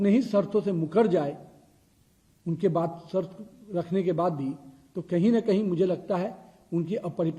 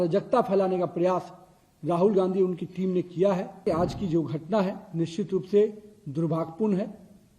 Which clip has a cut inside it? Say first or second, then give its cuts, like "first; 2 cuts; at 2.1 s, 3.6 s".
second; 1 cut; at 3.6 s